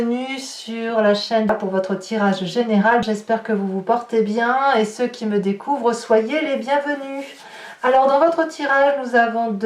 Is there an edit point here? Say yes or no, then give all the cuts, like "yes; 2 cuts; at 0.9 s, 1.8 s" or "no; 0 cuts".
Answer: yes; 2 cuts; at 1.5 s, 3.0 s